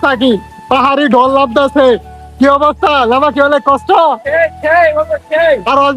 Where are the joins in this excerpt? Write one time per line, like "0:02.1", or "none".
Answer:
none